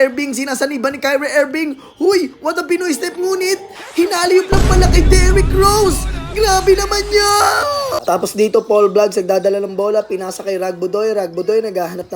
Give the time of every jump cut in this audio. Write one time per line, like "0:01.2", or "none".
0:08.0